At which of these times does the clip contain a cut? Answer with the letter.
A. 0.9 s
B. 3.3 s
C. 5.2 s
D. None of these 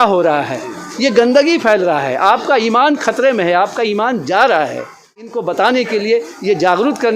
C